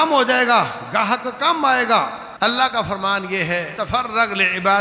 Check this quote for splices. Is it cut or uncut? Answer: cut